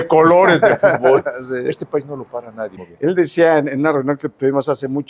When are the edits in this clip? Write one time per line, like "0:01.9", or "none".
0:02.8